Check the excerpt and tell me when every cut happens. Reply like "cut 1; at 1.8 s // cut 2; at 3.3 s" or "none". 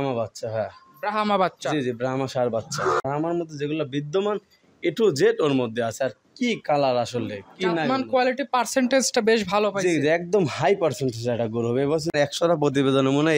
cut 1; at 3.0 s // cut 2; at 12.1 s